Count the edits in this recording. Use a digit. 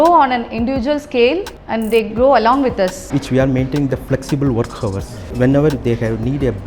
3